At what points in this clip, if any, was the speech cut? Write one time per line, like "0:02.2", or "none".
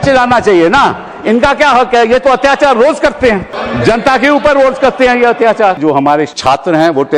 0:03.6
0:06.0